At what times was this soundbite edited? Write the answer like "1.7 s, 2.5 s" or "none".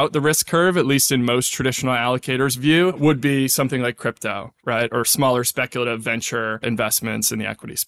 3.0 s, 6.6 s